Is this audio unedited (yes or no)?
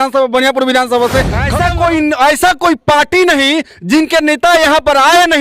no